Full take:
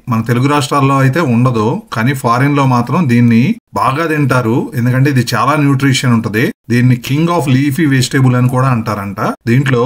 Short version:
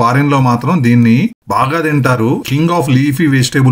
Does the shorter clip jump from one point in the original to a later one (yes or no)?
yes